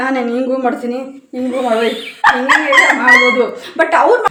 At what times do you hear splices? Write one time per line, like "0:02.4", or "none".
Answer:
none